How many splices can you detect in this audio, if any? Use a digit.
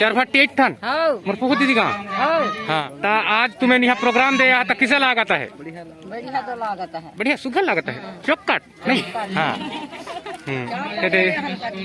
1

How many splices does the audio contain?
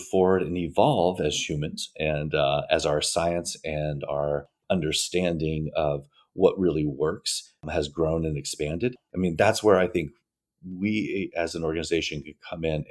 0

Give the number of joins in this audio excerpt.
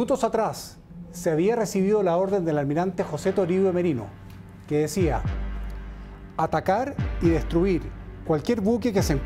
0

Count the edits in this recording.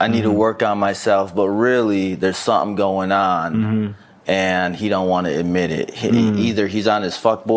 0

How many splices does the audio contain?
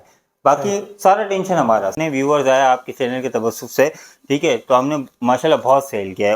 1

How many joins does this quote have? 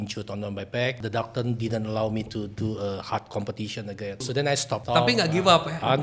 2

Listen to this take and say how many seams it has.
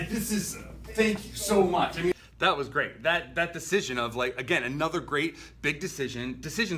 0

